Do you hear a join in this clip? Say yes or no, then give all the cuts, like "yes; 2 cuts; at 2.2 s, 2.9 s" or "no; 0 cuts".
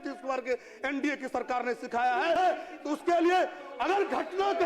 yes; 1 cut; at 2.4 s